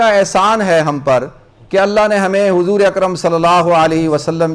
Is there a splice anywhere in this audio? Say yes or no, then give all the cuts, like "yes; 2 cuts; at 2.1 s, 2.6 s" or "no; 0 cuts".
no; 0 cuts